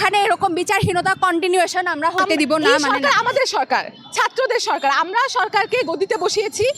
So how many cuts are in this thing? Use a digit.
1